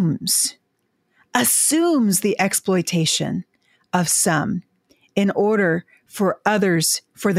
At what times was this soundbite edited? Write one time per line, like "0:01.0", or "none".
none